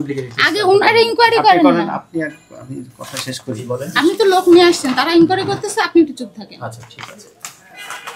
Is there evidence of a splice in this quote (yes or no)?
no